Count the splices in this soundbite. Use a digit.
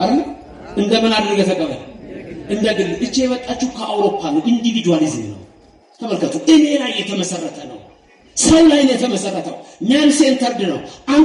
0